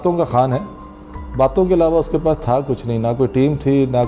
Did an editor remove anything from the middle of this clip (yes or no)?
no